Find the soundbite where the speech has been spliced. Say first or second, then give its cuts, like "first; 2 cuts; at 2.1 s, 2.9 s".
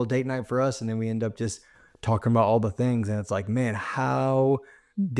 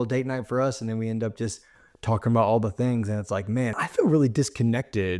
second; 1 cut; at 3.8 s